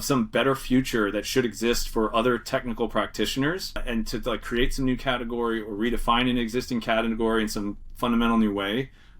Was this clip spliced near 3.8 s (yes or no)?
yes